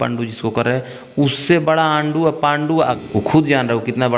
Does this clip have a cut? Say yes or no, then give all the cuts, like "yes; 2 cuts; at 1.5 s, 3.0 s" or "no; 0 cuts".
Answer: yes; 1 cut; at 3.0 s